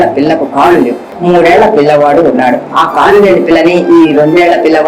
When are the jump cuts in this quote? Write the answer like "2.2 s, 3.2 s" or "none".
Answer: 1.1 s